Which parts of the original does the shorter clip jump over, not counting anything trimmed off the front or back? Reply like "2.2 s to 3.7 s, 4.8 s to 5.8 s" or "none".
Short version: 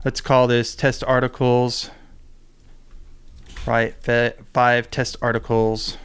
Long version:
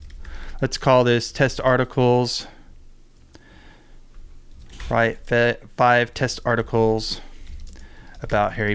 3.2 s to 3.9 s